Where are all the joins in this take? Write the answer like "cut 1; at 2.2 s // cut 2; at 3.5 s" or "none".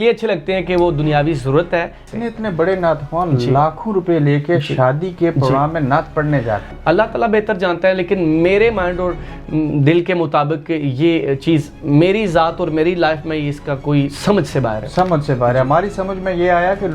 cut 1; at 2.0 s // cut 2; at 6.7 s